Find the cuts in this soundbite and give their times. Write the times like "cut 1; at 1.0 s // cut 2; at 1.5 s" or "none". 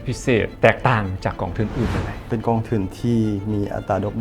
cut 1; at 2.3 s